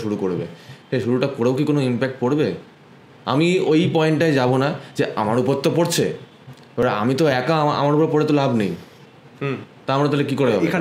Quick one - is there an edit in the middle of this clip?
no; 0 cuts

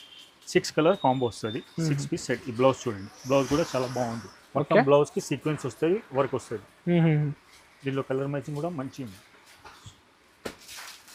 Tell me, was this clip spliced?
no; 0 cuts

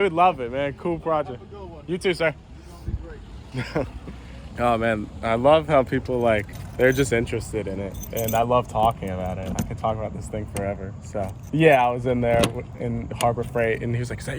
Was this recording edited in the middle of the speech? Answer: no; 0 cuts

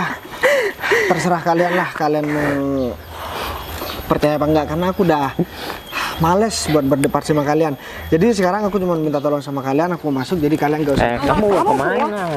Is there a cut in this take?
no; 0 cuts

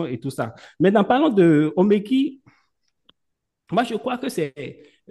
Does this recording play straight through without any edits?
yes; 0 cuts

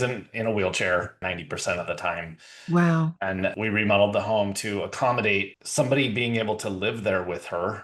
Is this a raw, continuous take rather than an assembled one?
no; 3 cuts; at 1.2 s, 3.5 s, 5.6 s

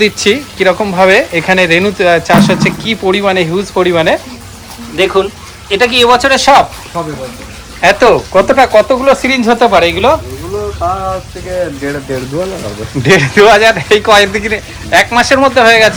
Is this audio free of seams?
yes; 0 cuts

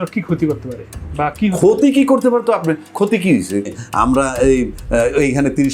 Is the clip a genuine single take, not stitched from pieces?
no; 1 cut; at 3.7 s

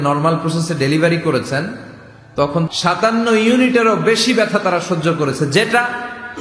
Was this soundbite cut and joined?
yes; 1 cut; at 2.7 s

